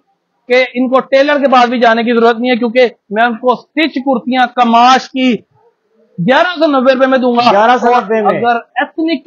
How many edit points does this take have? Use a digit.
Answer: 0